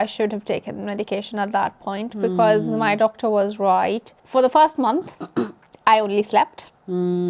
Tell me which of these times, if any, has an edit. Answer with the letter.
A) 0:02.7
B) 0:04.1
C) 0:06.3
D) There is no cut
B